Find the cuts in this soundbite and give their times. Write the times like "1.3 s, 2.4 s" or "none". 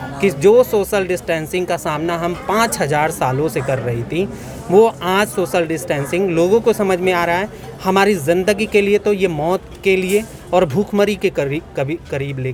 none